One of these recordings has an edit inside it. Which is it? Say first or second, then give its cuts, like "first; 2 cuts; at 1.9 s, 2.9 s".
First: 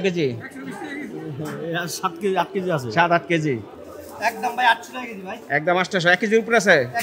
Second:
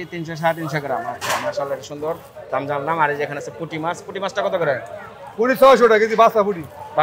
first; 1 cut; at 3.7 s